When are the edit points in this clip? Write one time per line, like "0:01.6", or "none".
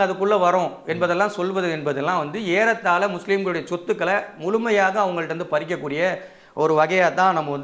none